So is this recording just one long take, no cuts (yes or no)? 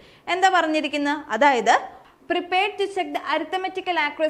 no